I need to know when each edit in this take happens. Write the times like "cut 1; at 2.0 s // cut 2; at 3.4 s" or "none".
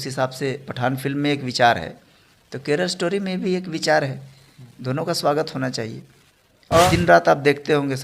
cut 1; at 6.9 s